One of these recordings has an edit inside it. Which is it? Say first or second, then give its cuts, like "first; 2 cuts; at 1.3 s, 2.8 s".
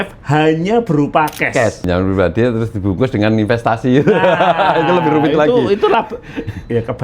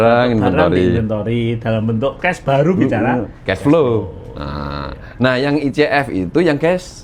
first; 1 cut; at 1.8 s